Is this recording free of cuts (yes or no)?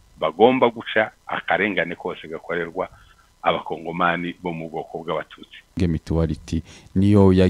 no